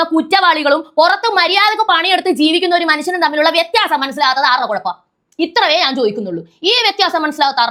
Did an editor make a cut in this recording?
no; 0 cuts

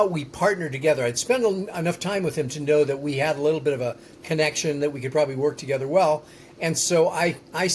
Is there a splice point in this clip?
no; 0 cuts

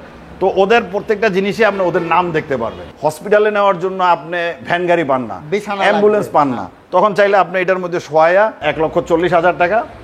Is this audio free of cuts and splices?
no; 2 cuts; at 2.8 s, 8.7 s

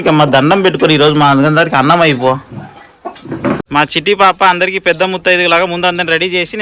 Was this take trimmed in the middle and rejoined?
yes; 1 cut; at 3.6 s

